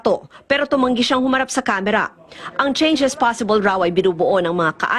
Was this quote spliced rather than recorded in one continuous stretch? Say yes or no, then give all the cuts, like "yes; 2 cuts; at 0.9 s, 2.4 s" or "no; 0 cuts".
no; 0 cuts